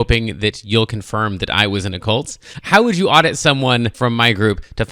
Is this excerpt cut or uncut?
cut